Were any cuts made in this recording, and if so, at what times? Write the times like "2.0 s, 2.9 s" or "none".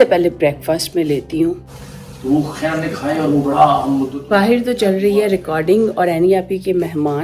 1.7 s, 4.2 s